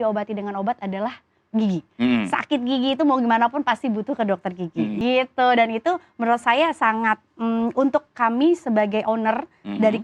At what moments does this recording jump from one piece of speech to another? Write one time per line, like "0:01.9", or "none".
0:04.9